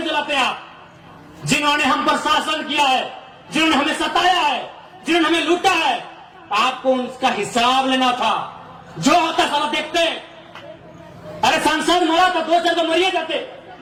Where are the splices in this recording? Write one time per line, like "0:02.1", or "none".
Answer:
none

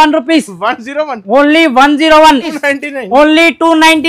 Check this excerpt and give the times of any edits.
0:02.6

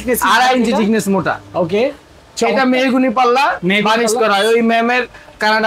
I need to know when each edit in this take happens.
none

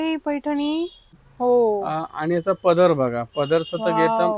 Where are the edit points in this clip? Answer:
0:01.2

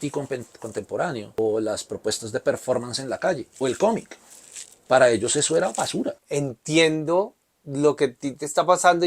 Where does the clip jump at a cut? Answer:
0:01.4
0:06.2

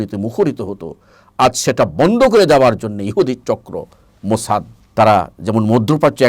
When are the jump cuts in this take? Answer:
0:04.8

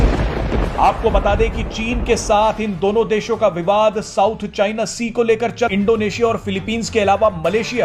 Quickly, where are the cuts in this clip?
0:05.7

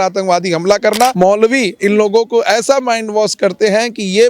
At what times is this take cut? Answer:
0:01.1

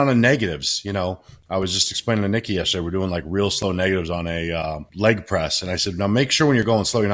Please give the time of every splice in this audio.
0:04.9

